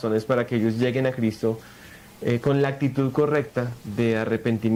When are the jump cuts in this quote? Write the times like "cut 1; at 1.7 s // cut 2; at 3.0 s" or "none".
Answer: none